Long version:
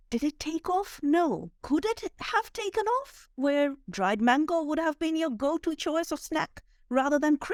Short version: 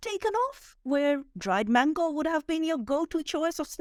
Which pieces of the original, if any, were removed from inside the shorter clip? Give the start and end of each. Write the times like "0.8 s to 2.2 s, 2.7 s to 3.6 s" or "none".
none